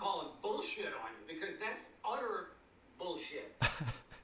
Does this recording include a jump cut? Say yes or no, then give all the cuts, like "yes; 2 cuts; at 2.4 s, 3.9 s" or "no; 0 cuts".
no; 0 cuts